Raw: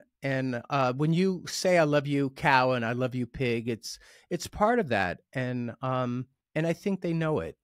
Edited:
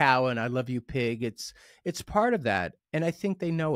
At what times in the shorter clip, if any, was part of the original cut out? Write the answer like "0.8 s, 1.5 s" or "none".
2.8 s

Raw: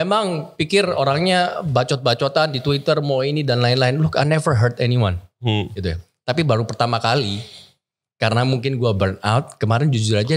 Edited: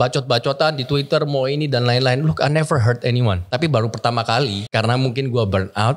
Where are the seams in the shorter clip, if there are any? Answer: 3.4 s, 4.6 s

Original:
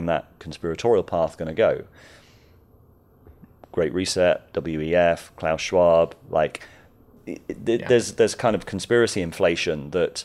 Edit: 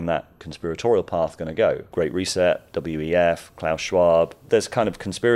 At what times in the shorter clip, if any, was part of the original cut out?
1.9 s, 4.4 s

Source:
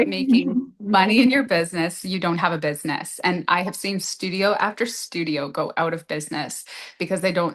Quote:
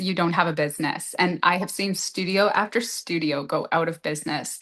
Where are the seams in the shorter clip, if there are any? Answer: none

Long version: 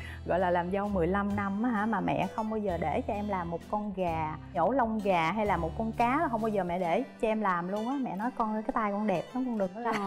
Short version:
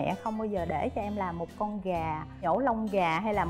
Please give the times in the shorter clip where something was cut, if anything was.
none

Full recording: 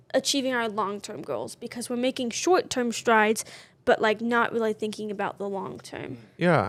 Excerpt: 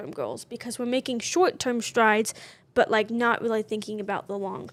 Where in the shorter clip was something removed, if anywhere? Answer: none

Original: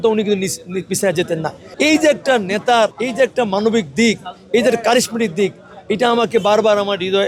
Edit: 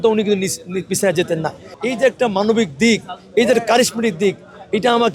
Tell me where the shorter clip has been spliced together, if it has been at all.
1.8 s

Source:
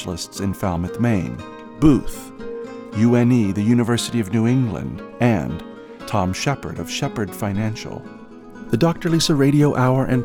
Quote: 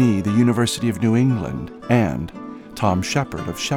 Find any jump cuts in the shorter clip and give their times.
none

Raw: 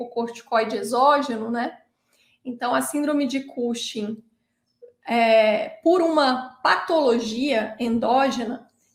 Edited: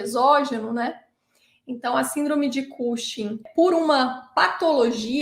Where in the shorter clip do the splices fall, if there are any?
3.4 s

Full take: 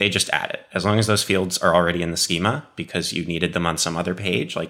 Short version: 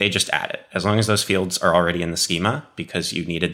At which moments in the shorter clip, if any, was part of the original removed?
none

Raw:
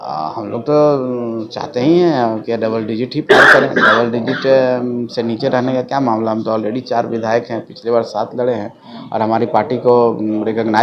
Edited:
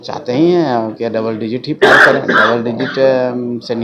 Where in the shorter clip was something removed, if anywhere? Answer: none

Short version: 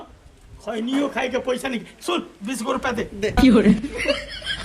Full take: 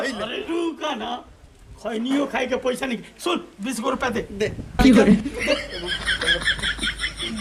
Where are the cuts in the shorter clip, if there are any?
3.3 s

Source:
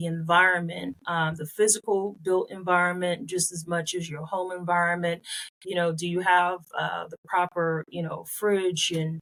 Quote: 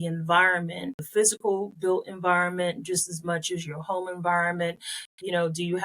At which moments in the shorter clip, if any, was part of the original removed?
1.0 s

